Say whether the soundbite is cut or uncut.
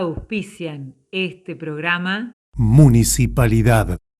cut